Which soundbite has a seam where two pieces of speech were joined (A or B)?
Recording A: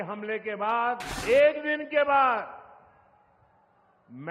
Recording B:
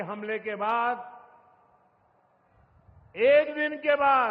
A